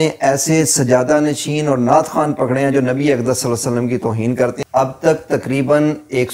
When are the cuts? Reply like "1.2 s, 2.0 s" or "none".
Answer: 4.6 s